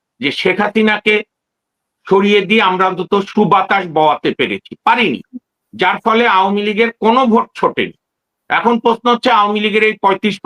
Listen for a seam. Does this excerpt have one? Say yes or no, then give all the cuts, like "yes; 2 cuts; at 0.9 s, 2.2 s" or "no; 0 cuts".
no; 0 cuts